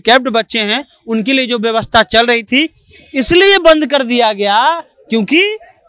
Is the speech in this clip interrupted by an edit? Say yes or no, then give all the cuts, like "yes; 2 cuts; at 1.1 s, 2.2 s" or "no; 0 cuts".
no; 0 cuts